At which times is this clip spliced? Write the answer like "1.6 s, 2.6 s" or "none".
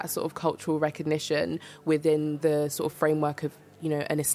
2.3 s